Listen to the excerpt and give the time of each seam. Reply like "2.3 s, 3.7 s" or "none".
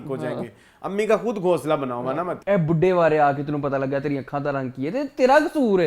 2.4 s